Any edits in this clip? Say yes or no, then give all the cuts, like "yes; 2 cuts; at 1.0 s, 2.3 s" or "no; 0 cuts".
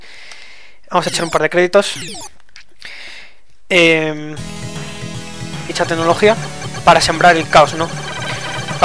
no; 0 cuts